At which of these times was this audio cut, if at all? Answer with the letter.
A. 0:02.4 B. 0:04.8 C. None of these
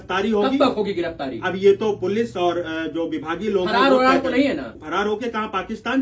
B